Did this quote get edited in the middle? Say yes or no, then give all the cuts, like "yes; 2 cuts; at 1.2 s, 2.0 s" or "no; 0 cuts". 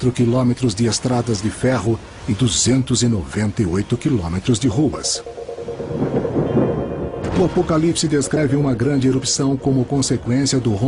yes; 1 cut; at 7.0 s